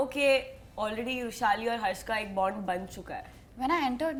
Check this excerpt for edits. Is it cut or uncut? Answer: uncut